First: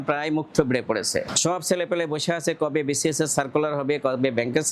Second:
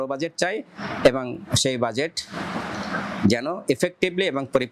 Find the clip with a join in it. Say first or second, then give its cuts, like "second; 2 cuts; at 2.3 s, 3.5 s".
first; 1 cut; at 1.3 s